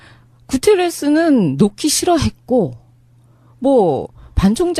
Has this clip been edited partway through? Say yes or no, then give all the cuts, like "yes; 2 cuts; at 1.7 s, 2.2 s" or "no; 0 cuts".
yes; 1 cut; at 1.2 s